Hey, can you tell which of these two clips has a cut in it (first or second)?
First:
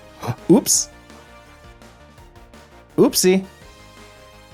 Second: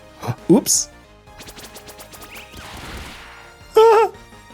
second